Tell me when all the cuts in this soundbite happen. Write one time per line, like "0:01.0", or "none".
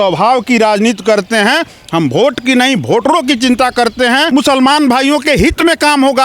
0:04.3